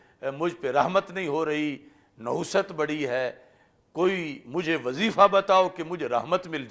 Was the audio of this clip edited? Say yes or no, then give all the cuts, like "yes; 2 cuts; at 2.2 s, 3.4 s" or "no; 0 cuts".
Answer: no; 0 cuts